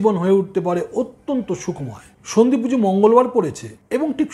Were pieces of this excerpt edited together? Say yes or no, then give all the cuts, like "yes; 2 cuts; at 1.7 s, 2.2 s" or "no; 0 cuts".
yes; 1 cut; at 2.1 s